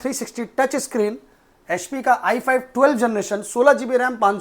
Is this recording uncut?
yes; 0 cuts

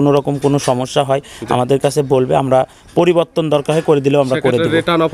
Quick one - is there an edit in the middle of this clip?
no; 0 cuts

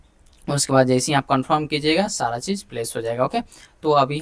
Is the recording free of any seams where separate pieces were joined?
yes; 0 cuts

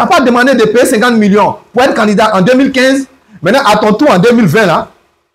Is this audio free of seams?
yes; 0 cuts

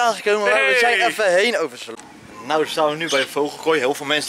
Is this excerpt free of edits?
no; 1 cut; at 2.0 s

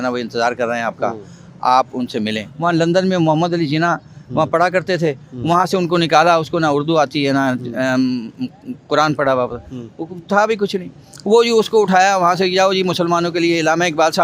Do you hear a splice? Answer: yes; 1 cut; at 2.5 s

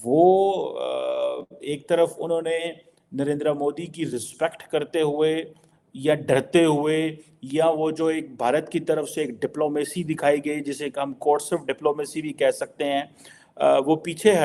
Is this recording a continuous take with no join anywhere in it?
yes; 0 cuts

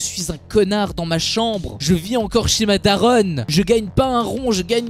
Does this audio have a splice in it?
no; 0 cuts

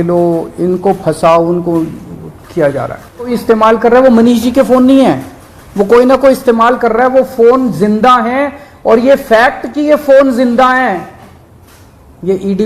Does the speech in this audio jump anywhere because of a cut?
yes; 1 cut; at 3.4 s

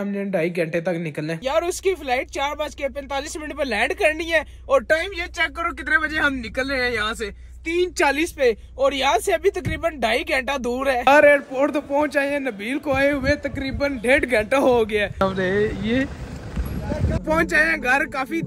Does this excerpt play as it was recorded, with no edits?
no; 4 cuts; at 1.3 s, 11.0 s, 15.2 s, 17.2 s

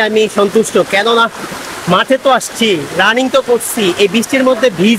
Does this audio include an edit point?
no; 0 cuts

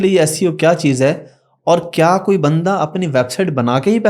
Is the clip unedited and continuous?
yes; 0 cuts

